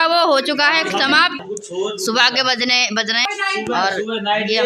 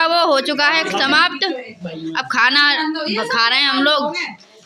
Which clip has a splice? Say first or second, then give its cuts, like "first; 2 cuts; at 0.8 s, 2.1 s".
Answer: first; 2 cuts; at 1.4 s, 3.3 s